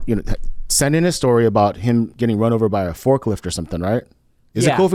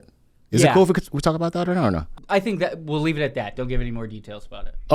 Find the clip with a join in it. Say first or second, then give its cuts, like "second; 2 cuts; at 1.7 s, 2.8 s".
second; 1 cut; at 2.0 s